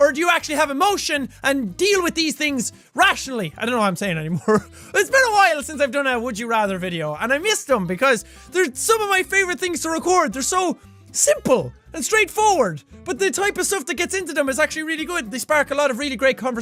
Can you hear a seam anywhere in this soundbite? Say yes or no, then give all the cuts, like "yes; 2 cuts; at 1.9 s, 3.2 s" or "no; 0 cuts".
no; 0 cuts